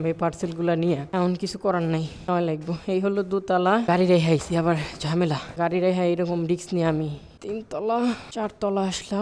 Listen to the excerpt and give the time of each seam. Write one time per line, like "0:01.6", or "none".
0:01.1
0:02.3
0:03.9
0:05.5
0:07.3
0:08.2